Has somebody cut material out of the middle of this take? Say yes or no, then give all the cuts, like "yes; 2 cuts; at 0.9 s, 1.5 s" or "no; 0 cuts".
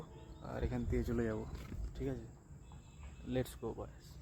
no; 0 cuts